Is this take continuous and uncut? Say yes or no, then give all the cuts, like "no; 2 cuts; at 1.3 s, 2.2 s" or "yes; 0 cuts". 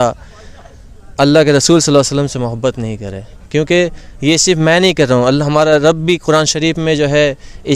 yes; 0 cuts